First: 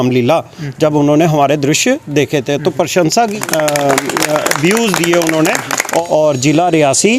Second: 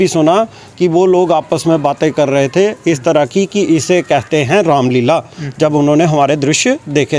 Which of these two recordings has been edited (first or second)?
first